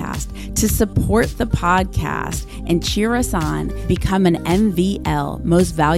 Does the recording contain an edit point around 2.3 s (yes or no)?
no